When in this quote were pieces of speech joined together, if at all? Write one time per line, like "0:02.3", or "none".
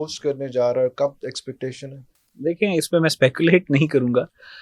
none